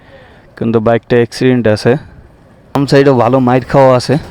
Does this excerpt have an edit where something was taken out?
yes; 1 cut; at 2.8 s

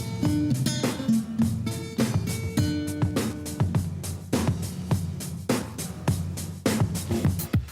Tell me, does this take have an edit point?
yes; 1 cut; at 1.1 s

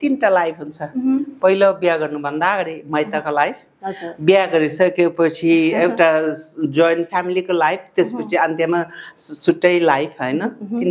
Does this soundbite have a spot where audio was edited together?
no; 0 cuts

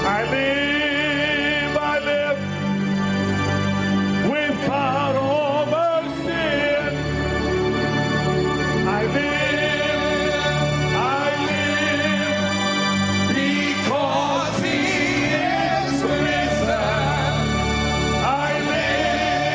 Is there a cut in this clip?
no; 0 cuts

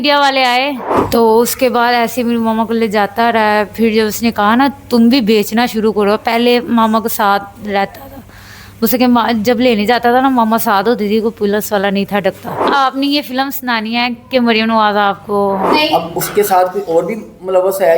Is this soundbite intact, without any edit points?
no; 3 cuts; at 0.9 s, 12.7 s, 15.7 s

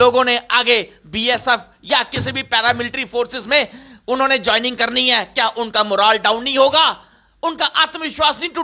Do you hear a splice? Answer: no; 0 cuts

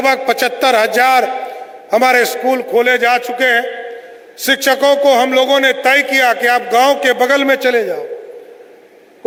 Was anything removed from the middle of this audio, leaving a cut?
no; 0 cuts

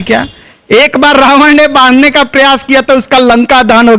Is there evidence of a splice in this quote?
no; 0 cuts

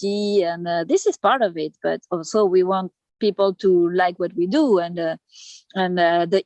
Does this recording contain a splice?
no; 0 cuts

